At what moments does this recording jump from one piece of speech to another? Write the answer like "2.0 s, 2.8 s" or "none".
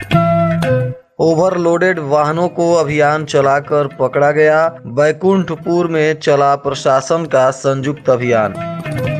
1.0 s